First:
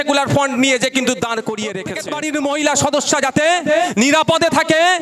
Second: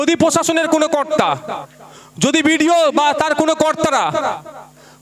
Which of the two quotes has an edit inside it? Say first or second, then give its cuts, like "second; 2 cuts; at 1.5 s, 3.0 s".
first; 1 cut; at 1.9 s